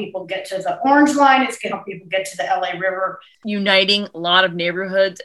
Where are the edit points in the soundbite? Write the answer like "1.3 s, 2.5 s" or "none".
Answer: 3.3 s